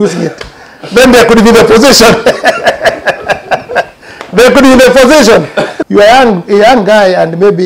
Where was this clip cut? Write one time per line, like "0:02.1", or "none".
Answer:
0:05.6